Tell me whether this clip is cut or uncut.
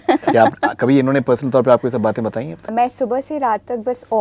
cut